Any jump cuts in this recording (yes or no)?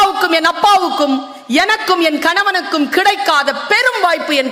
no